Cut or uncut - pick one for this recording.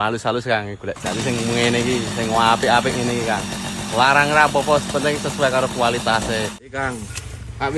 cut